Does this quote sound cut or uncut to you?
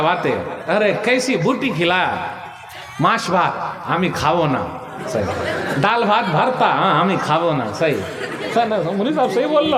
uncut